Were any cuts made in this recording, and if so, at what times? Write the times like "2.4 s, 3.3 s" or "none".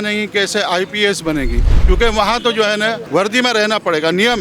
3.0 s